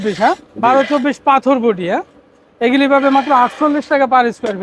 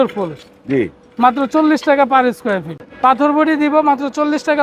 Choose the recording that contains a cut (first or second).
second